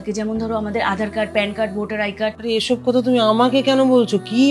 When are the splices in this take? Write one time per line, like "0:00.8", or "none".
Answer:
0:02.4